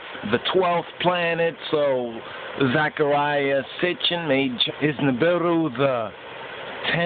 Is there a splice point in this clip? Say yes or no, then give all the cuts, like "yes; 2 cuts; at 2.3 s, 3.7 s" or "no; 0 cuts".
no; 0 cuts